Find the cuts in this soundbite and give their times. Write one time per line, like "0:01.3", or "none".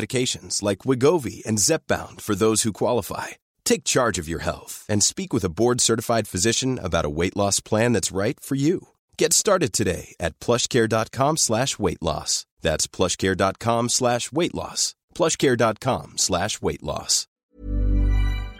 0:17.4